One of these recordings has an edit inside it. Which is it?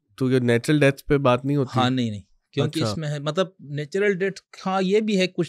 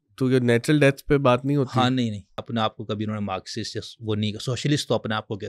second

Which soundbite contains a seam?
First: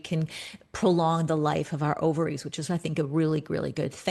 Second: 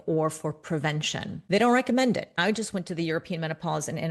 second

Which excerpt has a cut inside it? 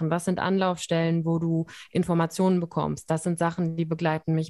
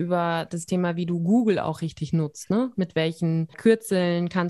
second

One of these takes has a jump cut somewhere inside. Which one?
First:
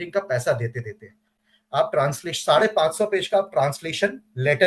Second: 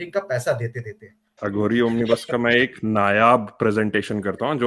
second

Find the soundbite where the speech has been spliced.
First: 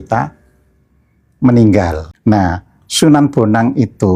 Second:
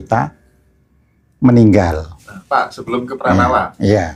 first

